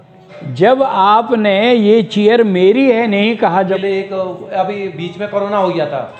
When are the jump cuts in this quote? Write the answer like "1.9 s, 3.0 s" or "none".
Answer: 3.8 s